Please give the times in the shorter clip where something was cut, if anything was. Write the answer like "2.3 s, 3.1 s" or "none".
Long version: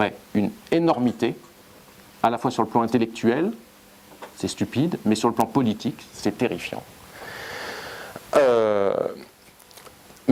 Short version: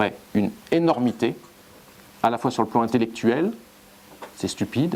none